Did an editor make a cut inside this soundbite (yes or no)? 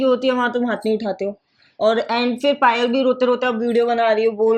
no